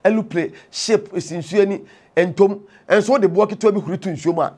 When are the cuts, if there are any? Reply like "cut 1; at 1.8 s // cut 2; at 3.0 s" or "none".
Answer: none

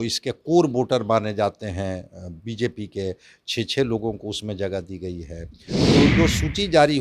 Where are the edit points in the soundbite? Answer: cut 1; at 5.9 s

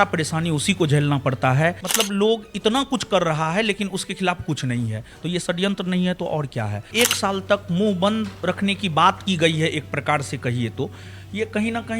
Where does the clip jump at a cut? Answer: cut 1; at 1.8 s // cut 2; at 6.9 s

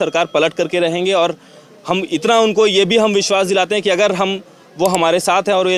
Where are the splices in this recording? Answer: none

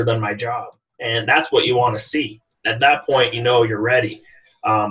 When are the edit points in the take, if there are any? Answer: none

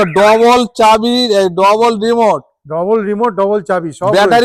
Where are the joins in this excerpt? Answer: none

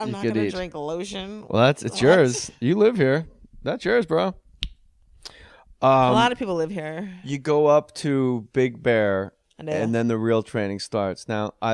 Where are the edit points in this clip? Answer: cut 1; at 8.8 s

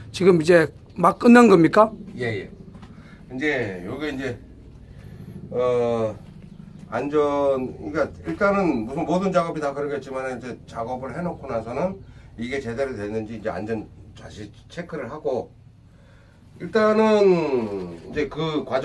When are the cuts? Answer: cut 1; at 12.3 s

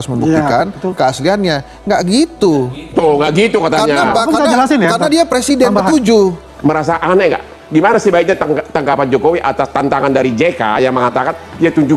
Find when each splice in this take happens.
cut 1; at 6.5 s

